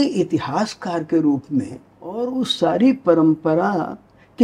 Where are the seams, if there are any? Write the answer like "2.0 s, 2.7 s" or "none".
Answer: 2.4 s